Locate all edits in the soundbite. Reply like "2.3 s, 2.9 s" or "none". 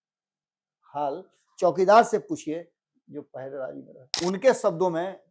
4.0 s